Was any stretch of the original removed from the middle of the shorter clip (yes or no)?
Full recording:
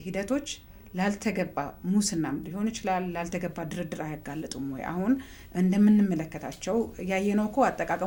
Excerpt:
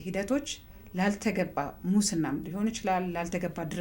no